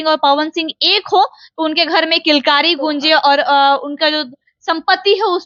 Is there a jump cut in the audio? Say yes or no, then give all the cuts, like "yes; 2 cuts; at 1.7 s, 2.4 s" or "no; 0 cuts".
no; 0 cuts